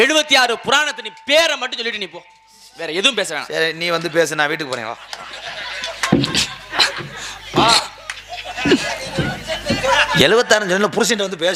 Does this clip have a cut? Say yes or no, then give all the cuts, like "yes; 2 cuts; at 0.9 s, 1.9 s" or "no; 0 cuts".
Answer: no; 0 cuts